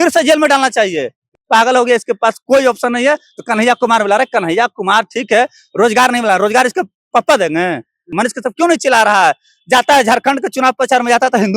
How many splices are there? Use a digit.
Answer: 2